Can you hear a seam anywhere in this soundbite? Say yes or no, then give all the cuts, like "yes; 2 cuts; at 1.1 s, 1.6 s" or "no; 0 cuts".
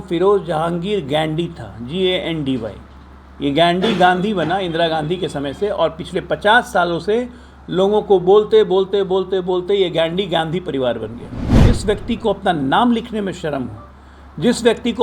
yes; 1 cut; at 11.5 s